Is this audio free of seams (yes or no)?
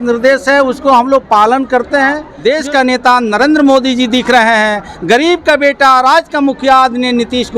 no